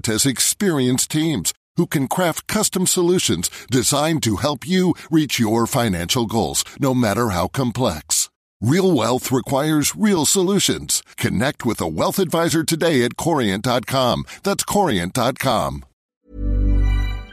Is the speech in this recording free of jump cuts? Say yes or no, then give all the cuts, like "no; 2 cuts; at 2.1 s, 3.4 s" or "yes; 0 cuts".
no; 1 cut; at 16.3 s